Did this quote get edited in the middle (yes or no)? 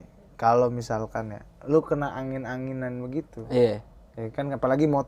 no